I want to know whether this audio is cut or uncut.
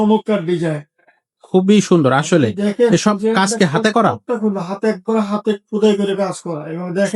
uncut